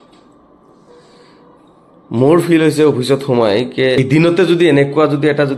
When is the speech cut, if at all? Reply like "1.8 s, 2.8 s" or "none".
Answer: 4.0 s